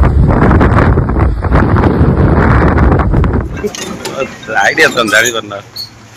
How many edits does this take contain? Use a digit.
1